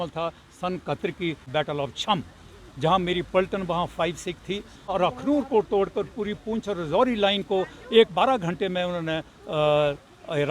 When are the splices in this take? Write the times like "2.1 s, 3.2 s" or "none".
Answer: 1.5 s, 4.9 s